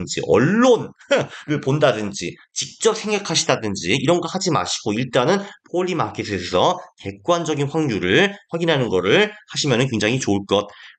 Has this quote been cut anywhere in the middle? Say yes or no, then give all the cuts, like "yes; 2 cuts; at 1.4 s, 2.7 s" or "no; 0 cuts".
no; 0 cuts